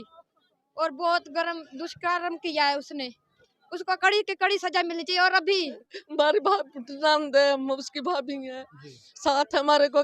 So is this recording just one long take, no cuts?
no; 1 cut; at 5.8 s

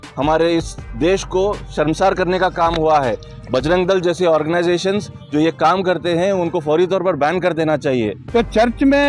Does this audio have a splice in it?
yes; 2 cuts; at 3.3 s, 8.2 s

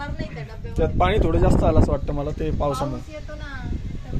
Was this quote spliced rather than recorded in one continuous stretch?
no; 0 cuts

